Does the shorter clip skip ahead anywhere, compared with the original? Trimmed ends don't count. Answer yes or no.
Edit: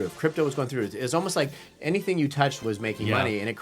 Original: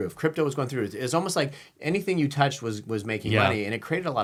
yes